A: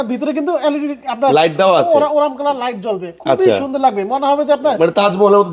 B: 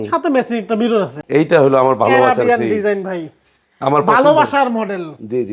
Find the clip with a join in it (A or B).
B